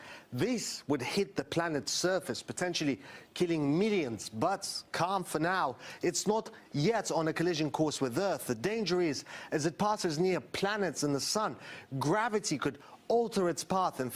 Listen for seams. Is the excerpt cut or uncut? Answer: uncut